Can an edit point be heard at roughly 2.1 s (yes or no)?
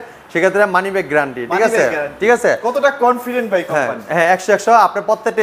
no